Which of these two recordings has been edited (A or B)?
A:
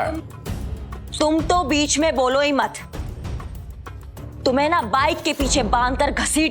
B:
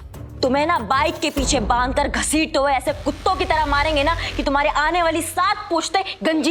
A